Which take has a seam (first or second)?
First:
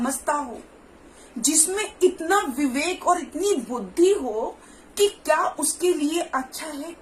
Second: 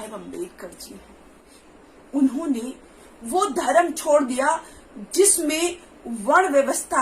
second